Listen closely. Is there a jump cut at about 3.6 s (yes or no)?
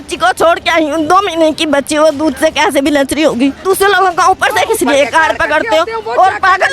yes